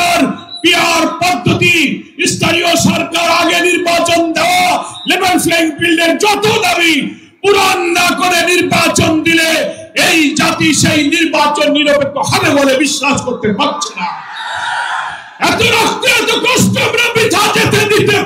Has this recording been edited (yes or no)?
no